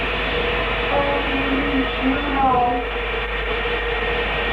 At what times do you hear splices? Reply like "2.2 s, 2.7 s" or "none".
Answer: 3.6 s